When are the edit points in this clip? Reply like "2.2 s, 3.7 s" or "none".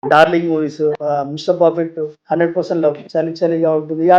1.0 s, 2.2 s, 3.0 s